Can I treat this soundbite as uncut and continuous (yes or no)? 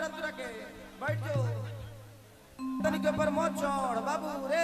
no